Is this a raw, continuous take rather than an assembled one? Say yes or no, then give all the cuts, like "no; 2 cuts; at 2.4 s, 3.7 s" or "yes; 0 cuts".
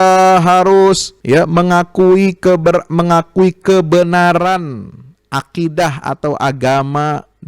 no; 1 cut; at 1.1 s